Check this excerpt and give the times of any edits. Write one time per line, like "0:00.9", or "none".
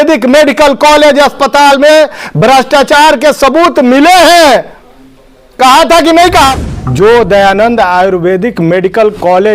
0:06.6